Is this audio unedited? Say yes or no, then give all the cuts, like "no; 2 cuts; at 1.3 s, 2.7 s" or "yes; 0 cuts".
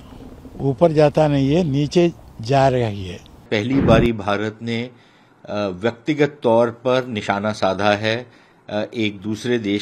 no; 1 cut; at 3.4 s